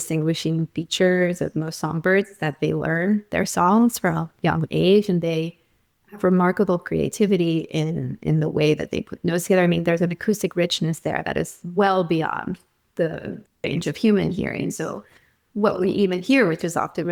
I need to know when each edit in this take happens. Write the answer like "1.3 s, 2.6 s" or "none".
none